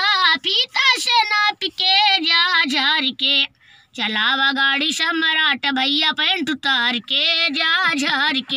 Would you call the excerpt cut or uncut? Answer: uncut